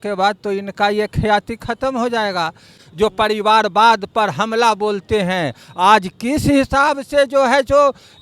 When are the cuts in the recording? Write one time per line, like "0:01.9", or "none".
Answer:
0:02.8

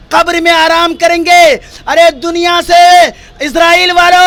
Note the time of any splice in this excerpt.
none

